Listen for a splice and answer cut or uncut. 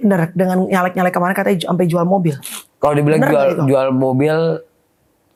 uncut